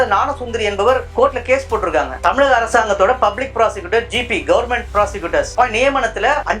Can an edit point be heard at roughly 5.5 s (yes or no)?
yes